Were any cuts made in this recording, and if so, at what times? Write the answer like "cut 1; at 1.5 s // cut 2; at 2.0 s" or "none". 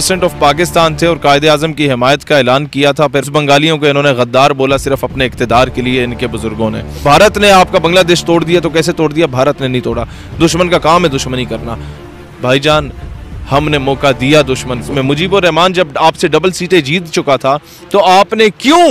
cut 1; at 3.3 s // cut 2; at 7.0 s // cut 3; at 14.9 s